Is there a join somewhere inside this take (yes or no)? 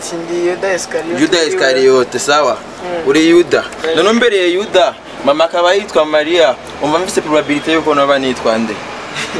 no